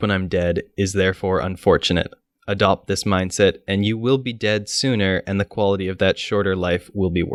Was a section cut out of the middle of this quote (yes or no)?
no